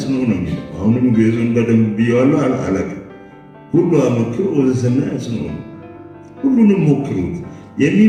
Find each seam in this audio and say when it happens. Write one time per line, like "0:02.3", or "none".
none